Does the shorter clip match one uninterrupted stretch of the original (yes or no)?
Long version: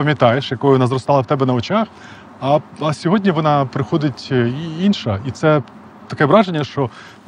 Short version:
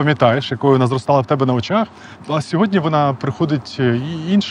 no